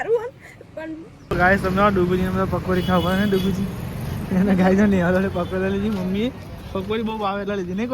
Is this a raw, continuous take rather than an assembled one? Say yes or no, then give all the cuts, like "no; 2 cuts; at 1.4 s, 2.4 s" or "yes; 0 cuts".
no; 1 cut; at 1.2 s